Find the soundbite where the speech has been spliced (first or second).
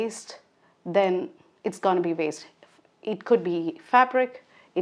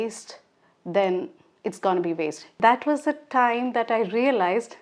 second